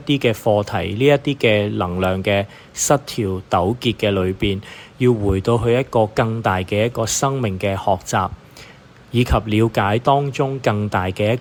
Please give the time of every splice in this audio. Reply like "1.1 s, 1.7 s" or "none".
none